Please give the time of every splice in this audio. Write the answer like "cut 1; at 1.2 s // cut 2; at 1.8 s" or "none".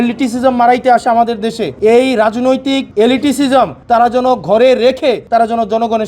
cut 1; at 1.7 s // cut 2; at 2.9 s // cut 3; at 3.8 s // cut 4; at 5.2 s